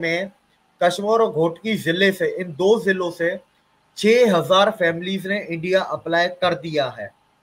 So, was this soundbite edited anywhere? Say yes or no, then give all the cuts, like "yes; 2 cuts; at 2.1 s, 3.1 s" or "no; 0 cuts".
no; 0 cuts